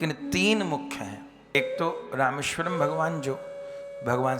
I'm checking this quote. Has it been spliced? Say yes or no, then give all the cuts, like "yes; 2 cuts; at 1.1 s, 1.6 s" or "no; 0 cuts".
yes; 1 cut; at 1.5 s